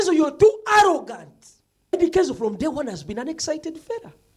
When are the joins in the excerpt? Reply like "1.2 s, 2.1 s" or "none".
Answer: 1.9 s